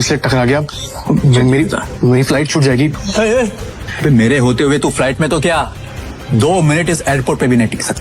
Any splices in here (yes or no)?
yes